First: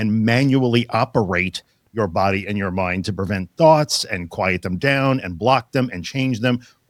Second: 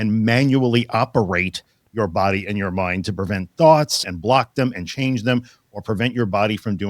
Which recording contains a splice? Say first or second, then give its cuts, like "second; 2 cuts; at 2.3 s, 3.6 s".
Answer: second; 1 cut; at 4.1 s